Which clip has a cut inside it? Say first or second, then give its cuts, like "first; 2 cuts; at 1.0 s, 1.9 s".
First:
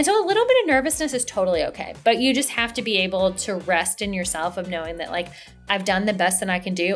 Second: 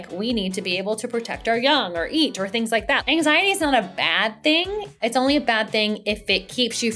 second; 2 cuts; at 3.0 s, 5.0 s